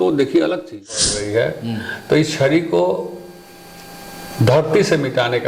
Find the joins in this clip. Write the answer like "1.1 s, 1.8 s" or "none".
0.9 s